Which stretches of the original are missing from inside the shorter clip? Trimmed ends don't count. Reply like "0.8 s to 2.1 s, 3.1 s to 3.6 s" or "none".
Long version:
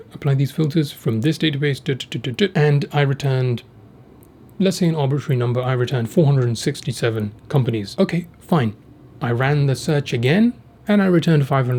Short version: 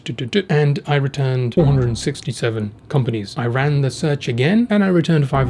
3.6 s to 6.1 s, 7.9 s to 9.1 s, 10.5 s to 10.9 s